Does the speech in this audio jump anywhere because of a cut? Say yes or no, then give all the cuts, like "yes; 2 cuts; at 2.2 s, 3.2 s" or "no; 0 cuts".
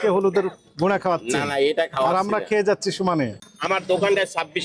yes; 1 cut; at 3.4 s